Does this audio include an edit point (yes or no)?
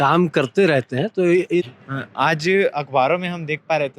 yes